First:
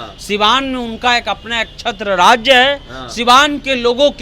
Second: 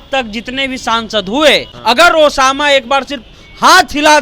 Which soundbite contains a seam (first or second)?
second